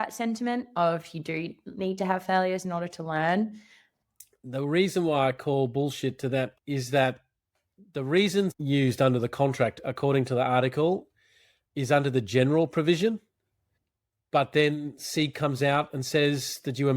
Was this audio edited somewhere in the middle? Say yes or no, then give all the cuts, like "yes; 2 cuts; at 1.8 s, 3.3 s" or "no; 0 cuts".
yes; 3 cuts; at 3.8 s, 6.5 s, 8.6 s